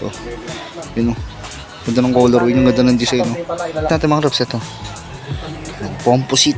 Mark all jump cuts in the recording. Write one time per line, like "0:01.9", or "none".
0:03.9